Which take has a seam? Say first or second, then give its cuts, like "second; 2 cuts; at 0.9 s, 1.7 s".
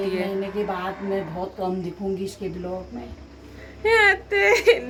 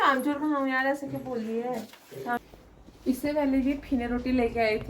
second; 1 cut; at 2.4 s